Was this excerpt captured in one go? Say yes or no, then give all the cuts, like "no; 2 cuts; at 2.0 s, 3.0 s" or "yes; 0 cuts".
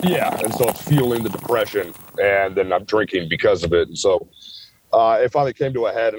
yes; 0 cuts